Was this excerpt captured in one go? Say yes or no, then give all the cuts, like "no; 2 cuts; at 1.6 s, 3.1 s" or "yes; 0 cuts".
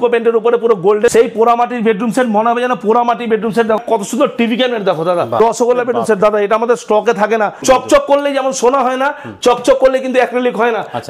no; 4 cuts; at 1.1 s, 3.8 s, 5.4 s, 7.6 s